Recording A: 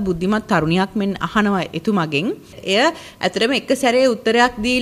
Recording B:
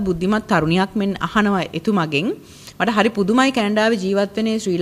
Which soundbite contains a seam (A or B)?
A